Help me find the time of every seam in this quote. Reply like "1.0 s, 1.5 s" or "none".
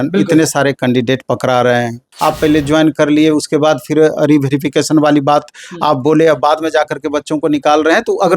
2.1 s